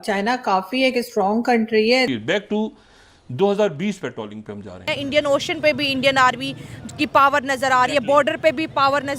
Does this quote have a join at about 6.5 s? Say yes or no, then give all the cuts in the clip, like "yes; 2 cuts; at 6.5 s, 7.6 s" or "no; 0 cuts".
no; 2 cuts; at 2.1 s, 4.9 s